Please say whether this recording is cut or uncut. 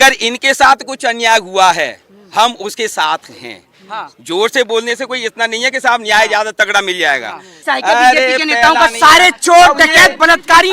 cut